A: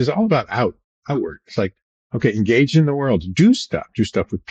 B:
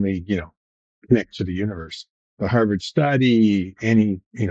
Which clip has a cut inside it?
B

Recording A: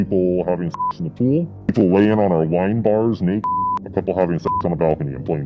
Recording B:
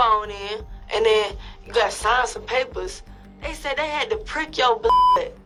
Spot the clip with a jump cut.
A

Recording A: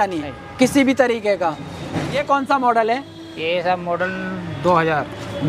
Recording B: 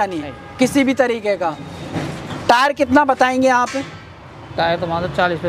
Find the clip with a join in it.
A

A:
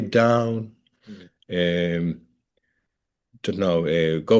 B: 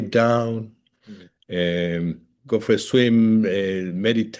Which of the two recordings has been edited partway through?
B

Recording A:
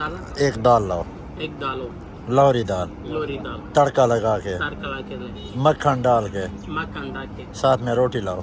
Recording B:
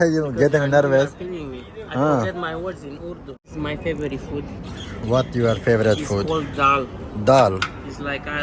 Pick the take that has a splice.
B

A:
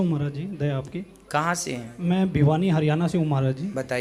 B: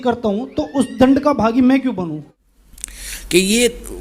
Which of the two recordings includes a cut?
B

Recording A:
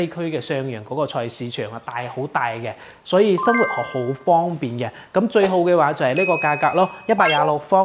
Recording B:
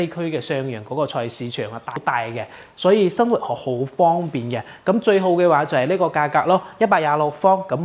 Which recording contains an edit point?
B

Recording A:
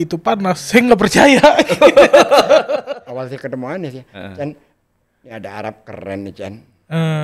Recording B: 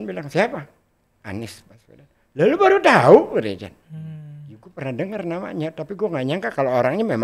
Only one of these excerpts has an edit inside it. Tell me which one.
A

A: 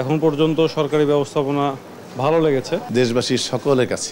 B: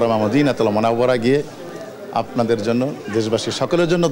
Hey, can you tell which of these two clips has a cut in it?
A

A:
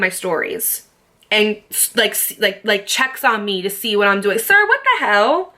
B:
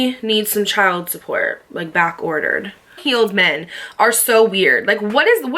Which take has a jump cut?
B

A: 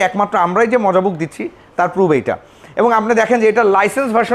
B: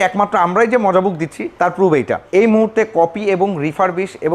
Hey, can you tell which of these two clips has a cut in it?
B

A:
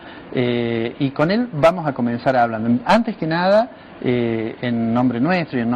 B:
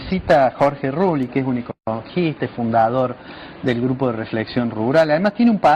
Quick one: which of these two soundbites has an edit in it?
A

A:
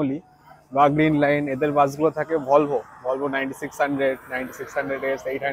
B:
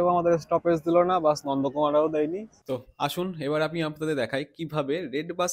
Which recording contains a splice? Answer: B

